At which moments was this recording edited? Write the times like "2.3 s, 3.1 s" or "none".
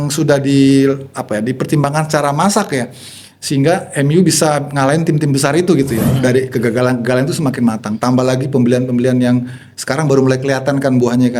6.1 s

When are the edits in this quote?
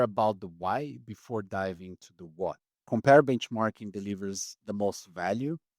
2.8 s

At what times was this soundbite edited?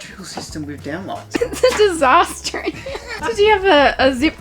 1.4 s, 3.1 s

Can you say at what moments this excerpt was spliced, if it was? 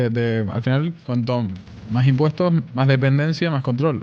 1.0 s, 2.7 s

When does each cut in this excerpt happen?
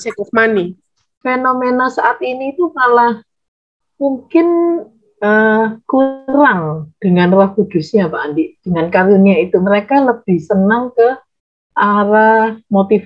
1.2 s

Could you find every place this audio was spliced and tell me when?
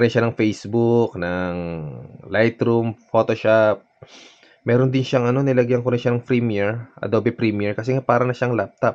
none

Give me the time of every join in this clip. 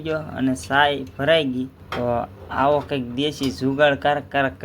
1.8 s

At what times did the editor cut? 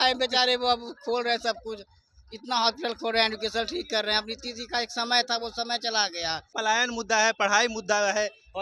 6.5 s

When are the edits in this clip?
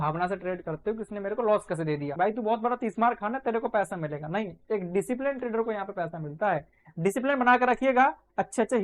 2.1 s

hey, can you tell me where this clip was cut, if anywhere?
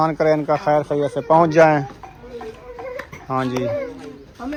none

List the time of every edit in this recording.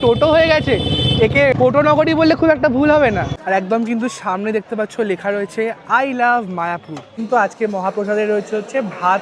1.5 s, 3.3 s, 7.1 s

